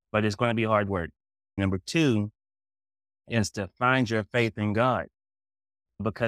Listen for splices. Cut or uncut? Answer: cut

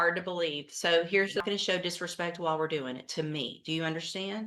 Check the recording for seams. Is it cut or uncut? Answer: cut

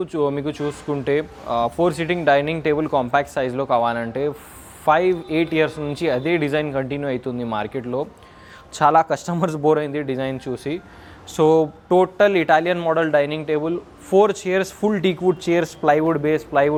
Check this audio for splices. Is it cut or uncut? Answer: uncut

